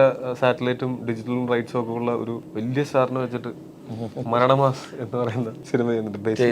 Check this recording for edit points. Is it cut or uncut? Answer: cut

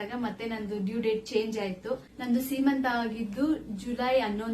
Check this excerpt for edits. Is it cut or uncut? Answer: cut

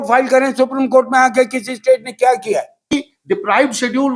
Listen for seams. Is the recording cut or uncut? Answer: cut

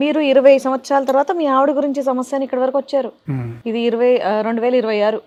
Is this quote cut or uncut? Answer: uncut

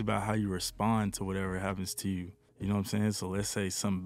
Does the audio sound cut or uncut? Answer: uncut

